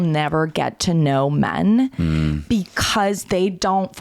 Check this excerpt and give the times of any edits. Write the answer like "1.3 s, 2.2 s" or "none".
none